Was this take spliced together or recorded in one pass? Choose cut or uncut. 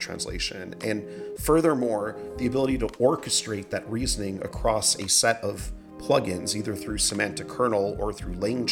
uncut